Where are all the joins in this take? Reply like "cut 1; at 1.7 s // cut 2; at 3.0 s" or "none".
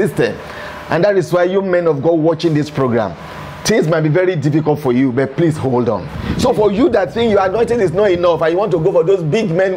cut 1; at 6.2 s